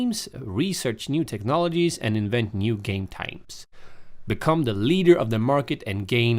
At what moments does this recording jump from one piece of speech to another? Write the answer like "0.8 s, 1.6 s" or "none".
4.4 s